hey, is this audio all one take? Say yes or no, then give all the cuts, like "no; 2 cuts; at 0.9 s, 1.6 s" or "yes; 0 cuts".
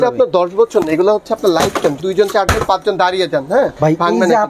no; 2 cuts; at 2.0 s, 3.7 s